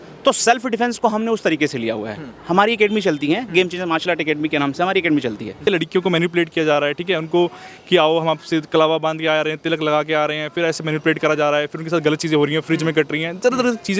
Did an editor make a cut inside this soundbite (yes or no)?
yes